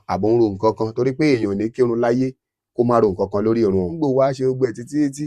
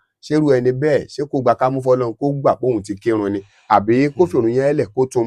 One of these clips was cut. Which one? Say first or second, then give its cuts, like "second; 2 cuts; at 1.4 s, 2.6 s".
first; 1 cut; at 3.9 s